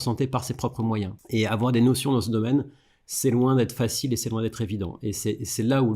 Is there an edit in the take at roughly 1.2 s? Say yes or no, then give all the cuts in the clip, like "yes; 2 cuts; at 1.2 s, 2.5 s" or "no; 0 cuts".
yes; 1 cut; at 1.2 s